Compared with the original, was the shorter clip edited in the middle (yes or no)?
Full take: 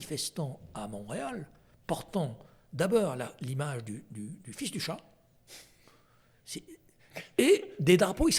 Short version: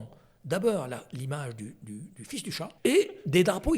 yes